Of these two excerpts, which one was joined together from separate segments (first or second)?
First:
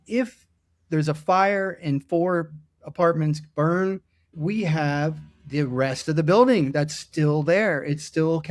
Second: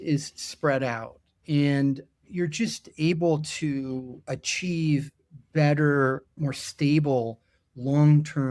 second